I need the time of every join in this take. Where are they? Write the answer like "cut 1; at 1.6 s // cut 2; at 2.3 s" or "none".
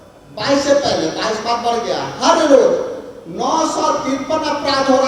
none